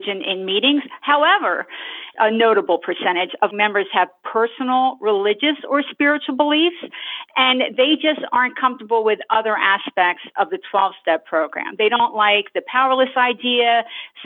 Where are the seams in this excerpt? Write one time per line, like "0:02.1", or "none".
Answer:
0:02.1
0:03.5